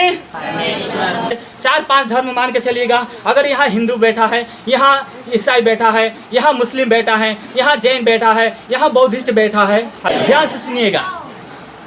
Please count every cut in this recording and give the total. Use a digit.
2